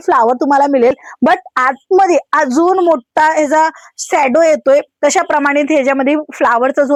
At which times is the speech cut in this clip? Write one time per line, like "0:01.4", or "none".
none